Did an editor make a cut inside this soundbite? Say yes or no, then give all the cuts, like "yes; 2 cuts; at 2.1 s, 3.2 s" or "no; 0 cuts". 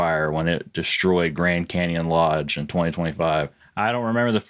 yes; 1 cut; at 3.6 s